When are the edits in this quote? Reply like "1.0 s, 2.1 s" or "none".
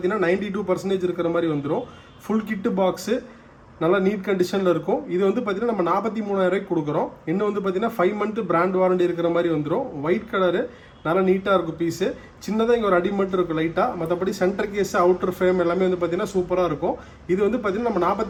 none